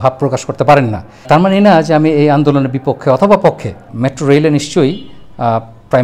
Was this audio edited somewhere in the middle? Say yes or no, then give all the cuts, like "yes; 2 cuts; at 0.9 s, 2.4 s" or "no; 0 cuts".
yes; 2 cuts; at 1.3 s, 3.9 s